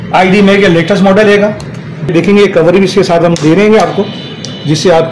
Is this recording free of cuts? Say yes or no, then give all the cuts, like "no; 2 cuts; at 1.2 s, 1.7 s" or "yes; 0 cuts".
no; 1 cut; at 2.1 s